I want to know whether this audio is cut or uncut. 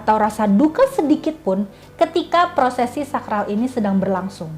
uncut